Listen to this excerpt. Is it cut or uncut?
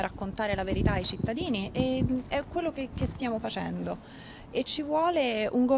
uncut